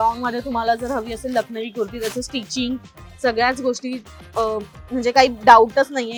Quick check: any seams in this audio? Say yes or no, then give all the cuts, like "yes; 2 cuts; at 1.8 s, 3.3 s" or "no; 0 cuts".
no; 0 cuts